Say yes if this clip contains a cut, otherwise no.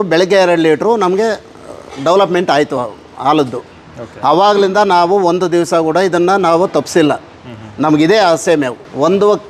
no